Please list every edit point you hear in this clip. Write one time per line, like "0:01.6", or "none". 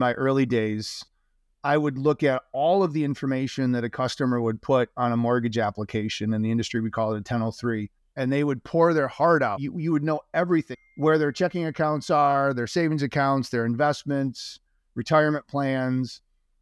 0:08.0
0:09.6
0:10.7